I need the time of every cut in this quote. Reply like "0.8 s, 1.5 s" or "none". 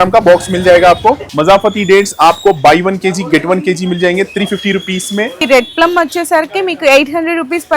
1.3 s, 5.4 s